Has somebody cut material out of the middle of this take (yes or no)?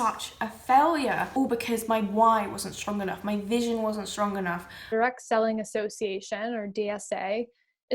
yes